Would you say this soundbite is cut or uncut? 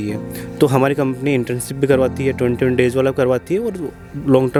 uncut